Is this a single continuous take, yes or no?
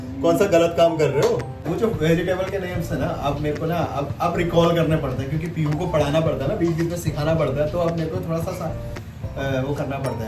no